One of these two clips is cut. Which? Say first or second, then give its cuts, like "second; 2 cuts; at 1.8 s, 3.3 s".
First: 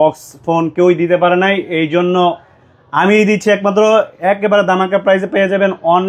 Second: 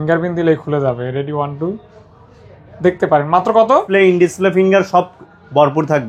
second; 1 cut; at 3.9 s